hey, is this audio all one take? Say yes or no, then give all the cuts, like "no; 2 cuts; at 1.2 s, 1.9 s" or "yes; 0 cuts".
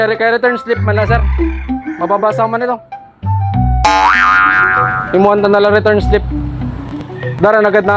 yes; 0 cuts